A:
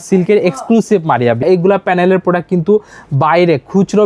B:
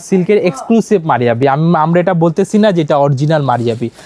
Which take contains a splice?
A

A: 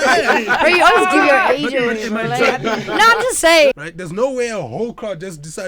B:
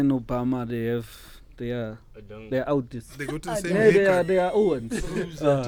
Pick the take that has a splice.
A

